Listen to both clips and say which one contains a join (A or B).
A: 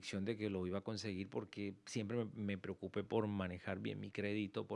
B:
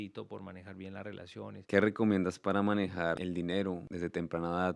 B